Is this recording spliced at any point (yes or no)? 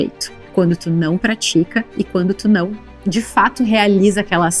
no